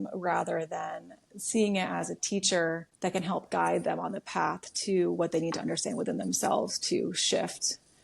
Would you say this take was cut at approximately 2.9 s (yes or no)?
yes